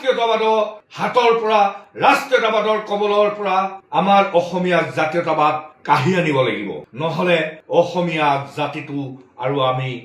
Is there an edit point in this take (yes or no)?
no